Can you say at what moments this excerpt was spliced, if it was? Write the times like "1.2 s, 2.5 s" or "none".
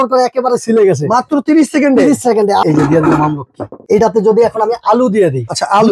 2.6 s, 3.8 s